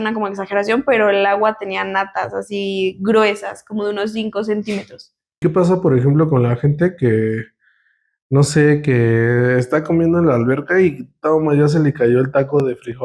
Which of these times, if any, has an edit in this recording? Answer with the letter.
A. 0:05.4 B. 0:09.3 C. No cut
A